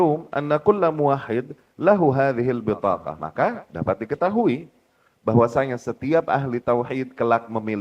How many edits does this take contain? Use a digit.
1